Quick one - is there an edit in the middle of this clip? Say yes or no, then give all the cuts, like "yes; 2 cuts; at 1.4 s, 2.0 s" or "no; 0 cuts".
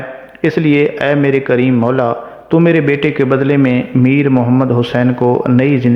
no; 0 cuts